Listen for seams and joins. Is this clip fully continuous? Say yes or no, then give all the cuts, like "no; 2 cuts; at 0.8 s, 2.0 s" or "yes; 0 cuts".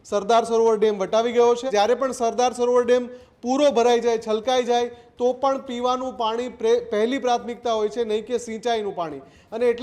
no; 1 cut; at 1.6 s